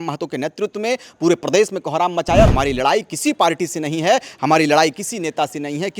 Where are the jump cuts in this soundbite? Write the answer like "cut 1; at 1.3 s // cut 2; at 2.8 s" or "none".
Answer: cut 1; at 2.5 s